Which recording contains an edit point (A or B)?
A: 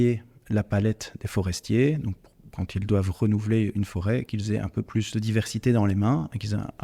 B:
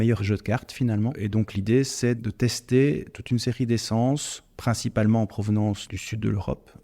B